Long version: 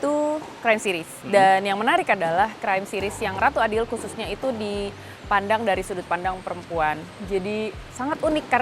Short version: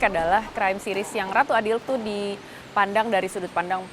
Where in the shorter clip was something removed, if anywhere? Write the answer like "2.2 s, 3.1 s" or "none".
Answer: 1.8 s